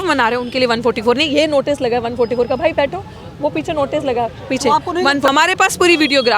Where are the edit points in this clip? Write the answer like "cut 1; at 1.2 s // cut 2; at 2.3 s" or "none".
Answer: cut 1; at 5.3 s